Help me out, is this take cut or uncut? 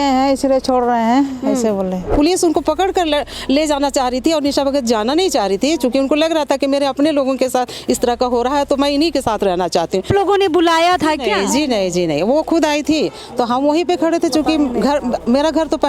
cut